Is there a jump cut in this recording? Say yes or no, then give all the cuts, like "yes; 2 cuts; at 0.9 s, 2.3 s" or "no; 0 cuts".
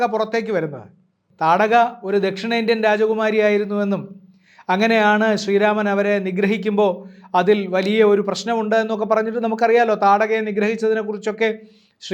yes; 1 cut; at 1.2 s